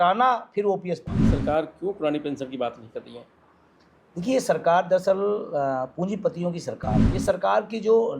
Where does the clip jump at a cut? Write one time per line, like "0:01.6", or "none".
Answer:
0:01.3
0:07.1

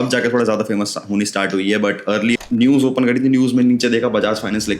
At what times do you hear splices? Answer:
0:02.4

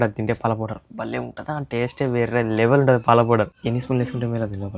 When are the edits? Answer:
0:03.6

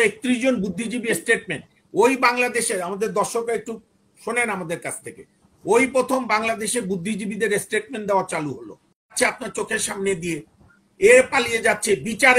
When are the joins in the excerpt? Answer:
0:09.1

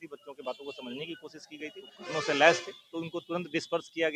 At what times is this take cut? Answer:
0:01.9

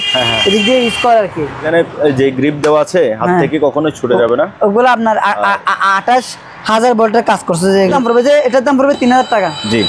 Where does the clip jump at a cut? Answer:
0:01.7
0:07.9

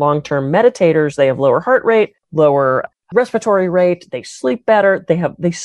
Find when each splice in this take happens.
0:02.4

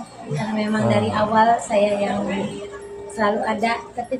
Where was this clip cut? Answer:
none

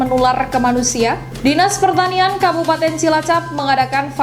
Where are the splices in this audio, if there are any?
0:01.3

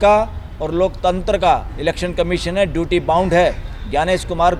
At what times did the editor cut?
none

